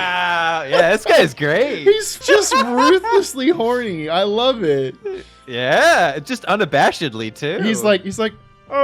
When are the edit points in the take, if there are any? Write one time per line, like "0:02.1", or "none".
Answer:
0:02.1